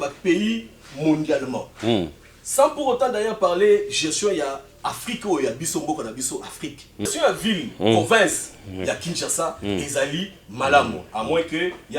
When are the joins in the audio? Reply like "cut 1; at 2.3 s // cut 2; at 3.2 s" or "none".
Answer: cut 1; at 7.1 s